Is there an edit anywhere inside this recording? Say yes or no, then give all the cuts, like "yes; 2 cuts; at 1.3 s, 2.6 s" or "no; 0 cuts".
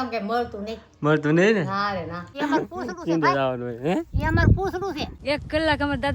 yes; 2 cuts; at 2.3 s, 5.2 s